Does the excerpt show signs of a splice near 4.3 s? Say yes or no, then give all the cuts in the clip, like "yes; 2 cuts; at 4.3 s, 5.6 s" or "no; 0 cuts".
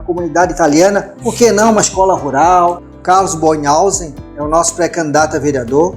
no; 1 cut; at 2.9 s